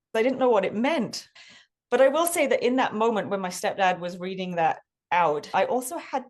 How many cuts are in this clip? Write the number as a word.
two